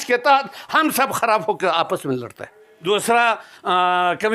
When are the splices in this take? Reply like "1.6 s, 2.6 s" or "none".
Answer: 2.8 s